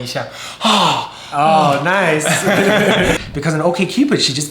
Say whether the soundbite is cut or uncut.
cut